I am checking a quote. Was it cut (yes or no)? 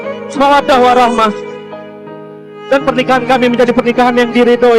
no